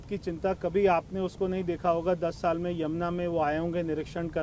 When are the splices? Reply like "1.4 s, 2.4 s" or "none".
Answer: none